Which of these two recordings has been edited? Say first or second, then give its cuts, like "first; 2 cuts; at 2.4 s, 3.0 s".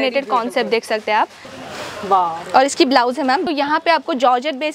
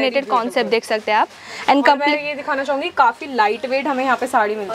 first; 2 cuts; at 1.5 s, 3.4 s